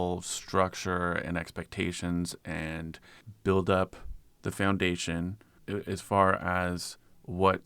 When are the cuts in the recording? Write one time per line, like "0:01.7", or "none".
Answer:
0:05.5